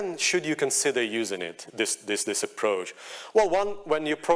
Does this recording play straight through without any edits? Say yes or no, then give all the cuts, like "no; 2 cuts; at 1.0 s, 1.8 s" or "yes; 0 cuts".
yes; 0 cuts